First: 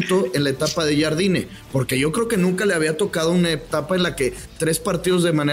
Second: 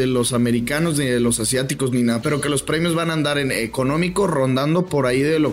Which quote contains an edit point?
second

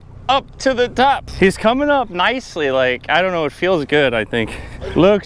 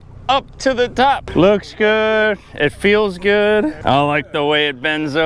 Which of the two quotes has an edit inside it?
second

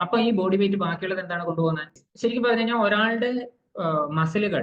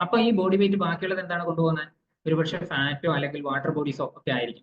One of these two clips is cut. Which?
first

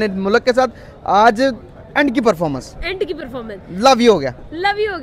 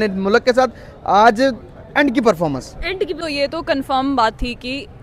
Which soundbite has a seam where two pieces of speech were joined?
second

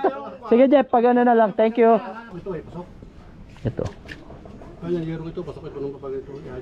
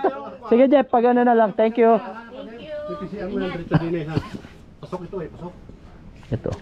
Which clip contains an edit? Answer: first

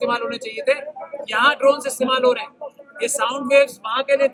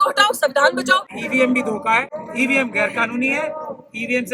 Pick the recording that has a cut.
second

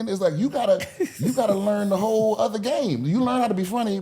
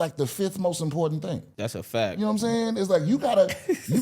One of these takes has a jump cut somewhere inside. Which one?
second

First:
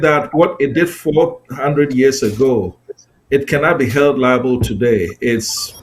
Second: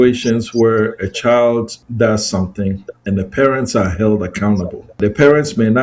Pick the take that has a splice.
second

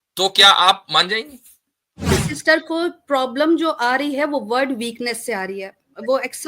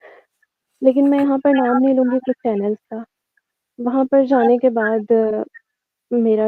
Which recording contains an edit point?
first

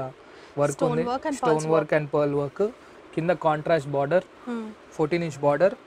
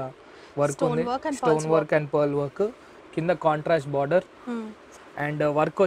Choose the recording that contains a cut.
second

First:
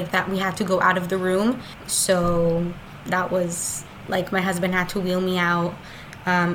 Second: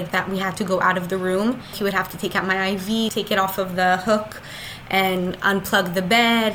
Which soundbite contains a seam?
second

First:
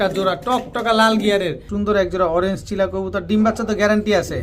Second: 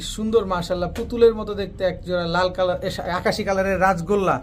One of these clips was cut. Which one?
first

